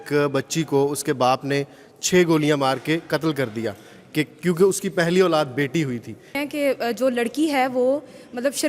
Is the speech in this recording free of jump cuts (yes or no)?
no